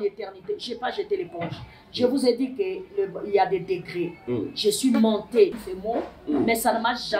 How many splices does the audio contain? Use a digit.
1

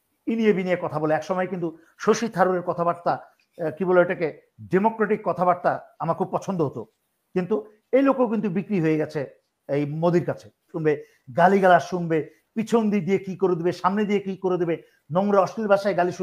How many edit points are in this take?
1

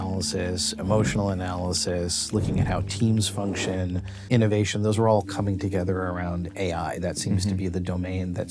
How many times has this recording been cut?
1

